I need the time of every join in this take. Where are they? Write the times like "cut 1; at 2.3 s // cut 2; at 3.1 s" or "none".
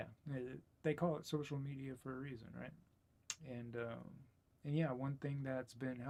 none